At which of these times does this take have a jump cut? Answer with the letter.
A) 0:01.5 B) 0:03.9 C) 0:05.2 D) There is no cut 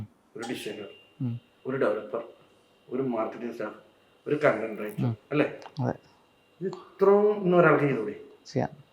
A